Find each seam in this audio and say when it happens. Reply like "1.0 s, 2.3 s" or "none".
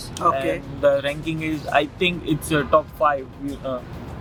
none